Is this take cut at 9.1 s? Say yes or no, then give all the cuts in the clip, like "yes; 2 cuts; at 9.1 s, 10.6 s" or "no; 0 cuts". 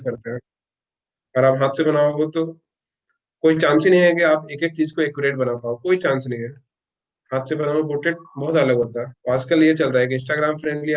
yes; 1 cut; at 9.1 s